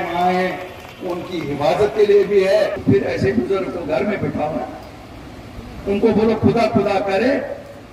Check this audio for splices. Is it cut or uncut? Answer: cut